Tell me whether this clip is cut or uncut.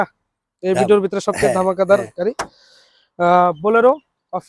uncut